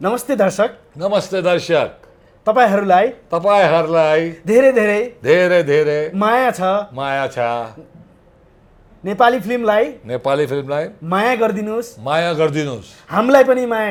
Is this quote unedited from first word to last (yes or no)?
yes